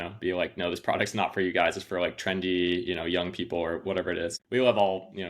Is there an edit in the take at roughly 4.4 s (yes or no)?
yes